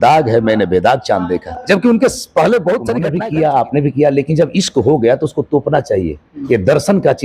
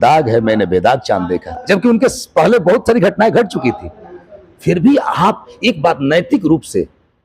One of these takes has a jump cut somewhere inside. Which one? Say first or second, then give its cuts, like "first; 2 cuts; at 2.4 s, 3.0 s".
first; 1 cut; at 3.1 s